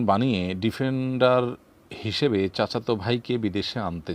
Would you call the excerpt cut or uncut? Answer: uncut